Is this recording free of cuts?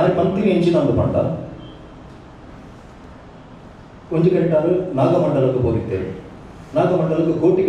yes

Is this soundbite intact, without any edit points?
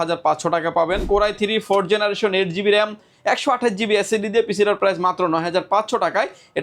no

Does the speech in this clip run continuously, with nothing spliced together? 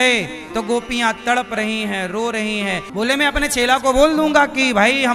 no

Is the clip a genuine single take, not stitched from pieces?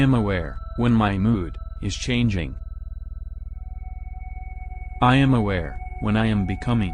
no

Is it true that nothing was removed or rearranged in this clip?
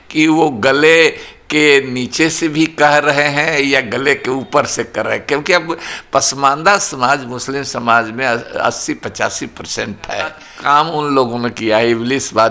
no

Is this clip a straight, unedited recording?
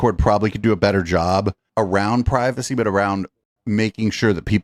yes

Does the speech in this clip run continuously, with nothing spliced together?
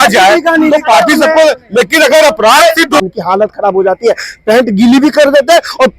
no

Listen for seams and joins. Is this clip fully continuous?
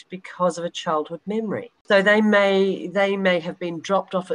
no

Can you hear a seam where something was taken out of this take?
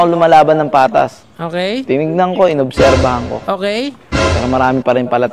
yes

